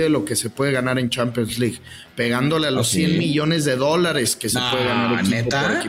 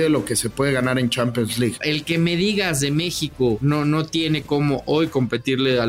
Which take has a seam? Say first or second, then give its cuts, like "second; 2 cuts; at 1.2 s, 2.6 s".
second; 2 cuts; at 1.8 s, 3.6 s